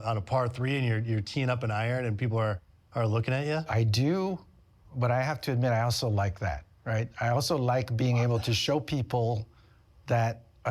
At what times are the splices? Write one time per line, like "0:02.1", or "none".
0:03.7